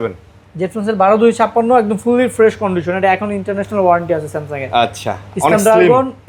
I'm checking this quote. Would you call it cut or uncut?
uncut